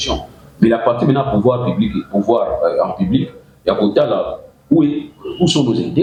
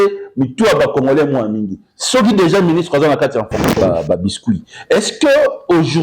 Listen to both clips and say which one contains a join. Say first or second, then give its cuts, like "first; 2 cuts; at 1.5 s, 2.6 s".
second; 1 cut; at 3.8 s